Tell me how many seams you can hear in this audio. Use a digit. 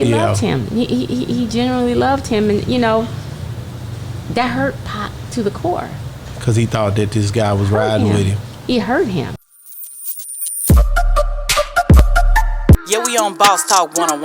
1